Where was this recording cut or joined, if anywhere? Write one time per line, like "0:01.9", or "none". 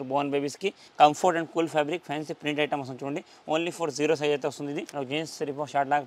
0:00.8
0:04.9